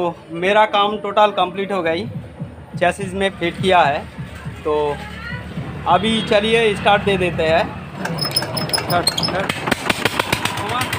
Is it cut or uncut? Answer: cut